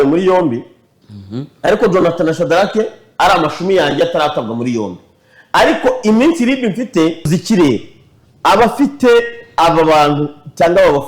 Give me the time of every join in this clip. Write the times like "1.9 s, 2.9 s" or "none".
7.3 s